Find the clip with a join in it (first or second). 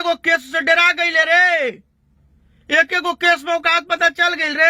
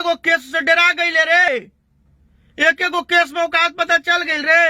second